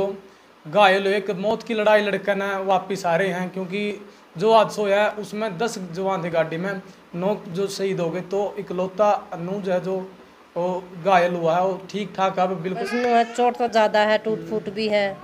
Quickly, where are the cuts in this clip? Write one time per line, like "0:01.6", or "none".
0:12.9

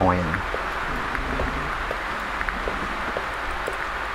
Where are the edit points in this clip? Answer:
none

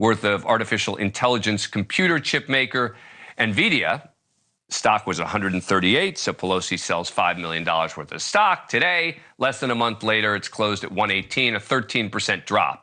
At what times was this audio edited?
0:03.1

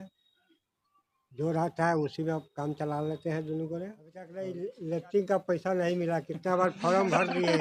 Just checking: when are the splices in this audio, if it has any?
0:04.4

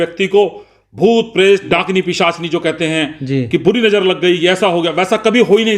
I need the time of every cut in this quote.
0:01.6

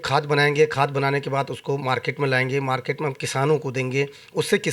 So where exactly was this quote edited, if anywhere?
none

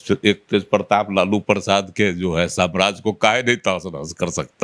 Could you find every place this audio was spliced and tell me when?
none

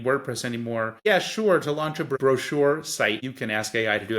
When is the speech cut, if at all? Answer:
0:00.9
0:02.1
0:03.3

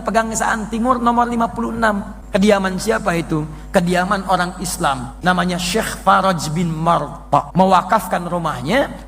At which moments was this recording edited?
0:02.1
0:05.1
0:07.5

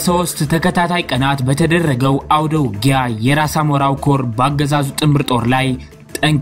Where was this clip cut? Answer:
none

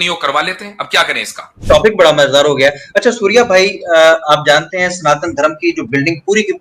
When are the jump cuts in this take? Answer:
0:01.5

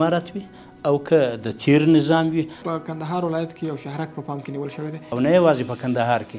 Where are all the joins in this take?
0:02.6
0:05.1

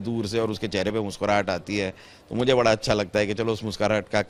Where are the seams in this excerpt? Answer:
none

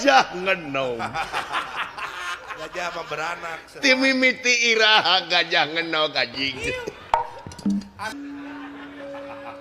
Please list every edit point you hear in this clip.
0:08.1

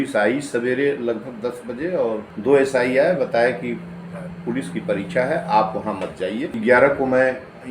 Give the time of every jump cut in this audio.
0:02.3
0:06.5

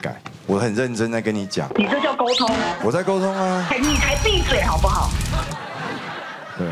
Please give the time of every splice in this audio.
0:03.7

